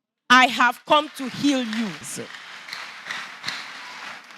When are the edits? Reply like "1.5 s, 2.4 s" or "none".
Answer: 2.0 s